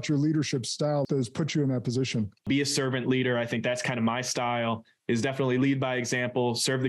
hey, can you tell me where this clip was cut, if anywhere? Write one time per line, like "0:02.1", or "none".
0:01.0
0:02.5